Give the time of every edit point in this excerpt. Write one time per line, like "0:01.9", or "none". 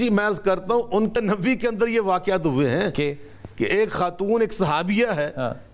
0:01.2